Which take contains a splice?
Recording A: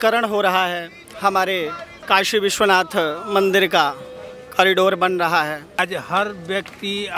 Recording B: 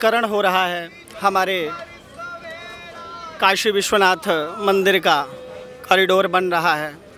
A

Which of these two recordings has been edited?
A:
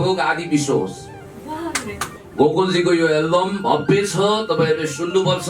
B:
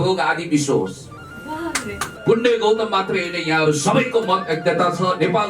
B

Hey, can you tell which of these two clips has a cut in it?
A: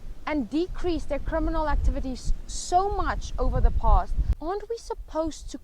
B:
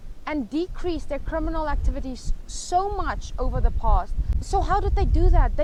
A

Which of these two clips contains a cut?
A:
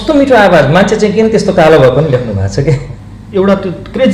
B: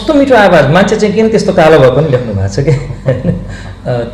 A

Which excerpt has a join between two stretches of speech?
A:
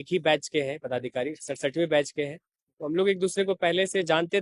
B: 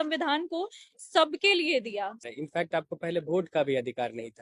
B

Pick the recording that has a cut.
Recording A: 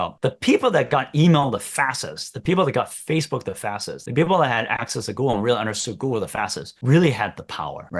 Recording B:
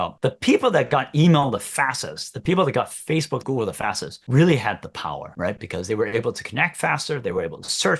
B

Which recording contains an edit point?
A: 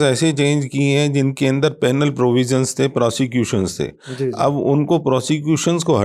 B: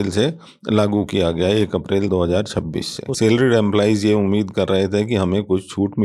B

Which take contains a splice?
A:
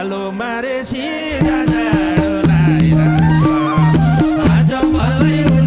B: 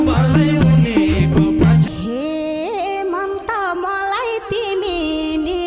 B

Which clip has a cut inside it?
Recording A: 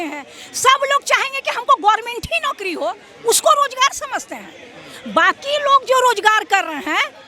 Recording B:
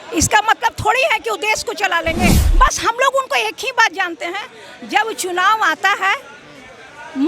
B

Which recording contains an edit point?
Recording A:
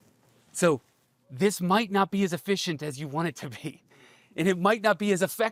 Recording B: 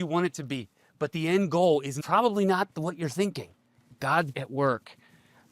B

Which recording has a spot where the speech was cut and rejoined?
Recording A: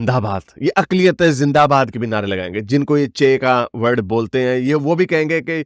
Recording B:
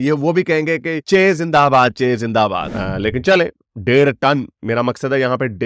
B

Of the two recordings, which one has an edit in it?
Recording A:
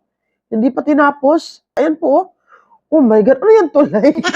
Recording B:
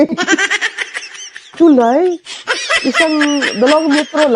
A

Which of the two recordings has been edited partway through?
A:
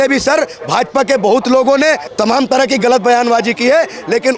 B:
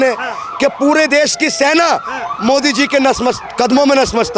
A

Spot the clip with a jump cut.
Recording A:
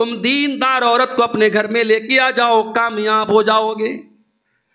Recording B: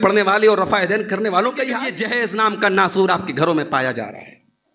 B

